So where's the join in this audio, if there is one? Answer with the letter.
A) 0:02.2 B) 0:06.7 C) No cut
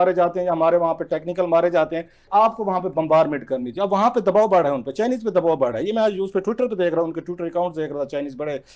A